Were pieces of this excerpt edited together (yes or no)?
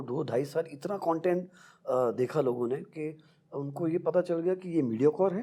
no